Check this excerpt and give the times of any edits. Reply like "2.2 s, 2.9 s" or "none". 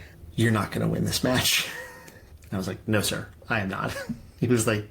2.3 s